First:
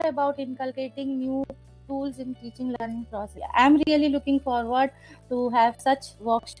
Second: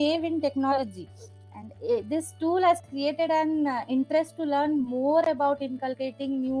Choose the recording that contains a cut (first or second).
first